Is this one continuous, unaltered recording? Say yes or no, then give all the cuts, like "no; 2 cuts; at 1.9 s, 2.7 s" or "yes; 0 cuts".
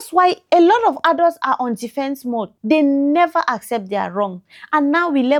yes; 0 cuts